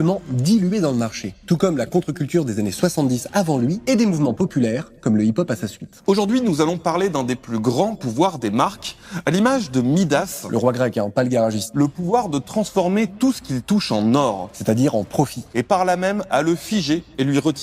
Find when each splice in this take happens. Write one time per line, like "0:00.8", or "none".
none